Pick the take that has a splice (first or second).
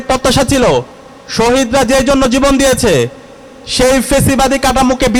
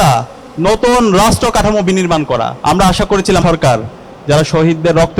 second